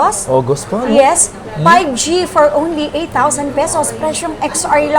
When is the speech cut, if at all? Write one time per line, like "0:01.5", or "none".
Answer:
0:01.3